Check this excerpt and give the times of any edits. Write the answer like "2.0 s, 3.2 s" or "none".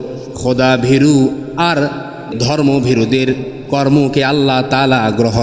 2.2 s